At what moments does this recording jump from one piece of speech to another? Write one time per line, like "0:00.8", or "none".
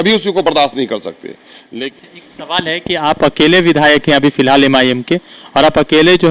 0:01.8